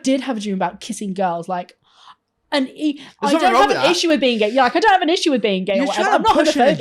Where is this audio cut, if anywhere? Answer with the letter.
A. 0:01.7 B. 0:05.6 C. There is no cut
C